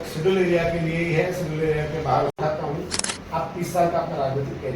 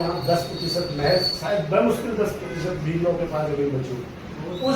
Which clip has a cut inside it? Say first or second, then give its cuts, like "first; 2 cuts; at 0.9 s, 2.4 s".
first; 1 cut; at 2.4 s